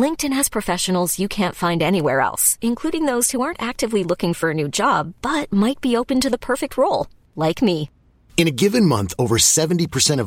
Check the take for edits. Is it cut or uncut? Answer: uncut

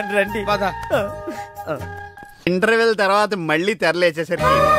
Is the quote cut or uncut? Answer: cut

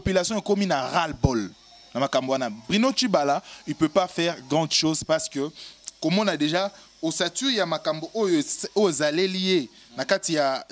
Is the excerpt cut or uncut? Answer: uncut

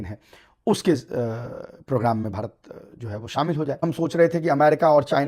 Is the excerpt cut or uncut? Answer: cut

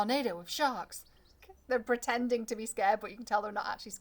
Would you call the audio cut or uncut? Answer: cut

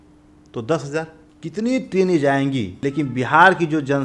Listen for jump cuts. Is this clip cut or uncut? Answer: cut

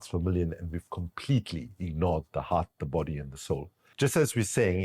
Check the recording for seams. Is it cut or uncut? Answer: cut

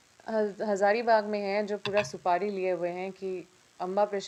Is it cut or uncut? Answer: uncut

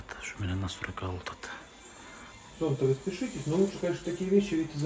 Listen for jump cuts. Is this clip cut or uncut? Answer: cut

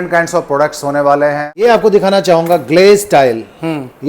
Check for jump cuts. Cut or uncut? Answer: cut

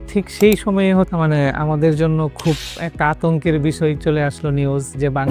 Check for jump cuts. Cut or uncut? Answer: cut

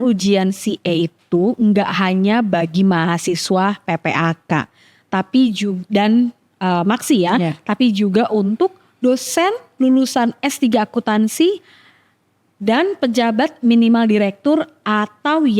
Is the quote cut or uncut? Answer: uncut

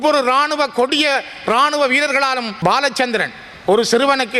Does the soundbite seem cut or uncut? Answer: cut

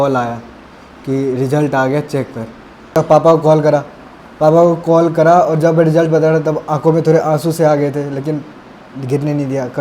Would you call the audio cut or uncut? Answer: cut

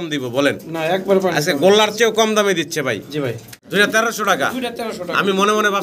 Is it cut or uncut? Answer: cut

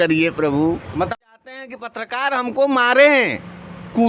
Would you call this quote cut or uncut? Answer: cut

